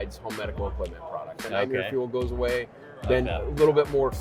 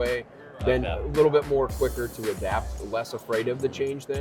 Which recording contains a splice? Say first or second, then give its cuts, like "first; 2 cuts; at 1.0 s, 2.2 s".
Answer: first; 1 cut; at 1.4 s